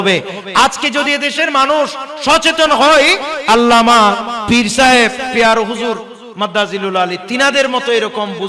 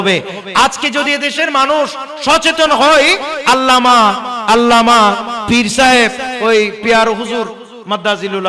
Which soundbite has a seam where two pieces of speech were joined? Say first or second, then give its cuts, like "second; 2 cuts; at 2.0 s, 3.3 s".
first; 2 cuts; at 3.3 s, 5.3 s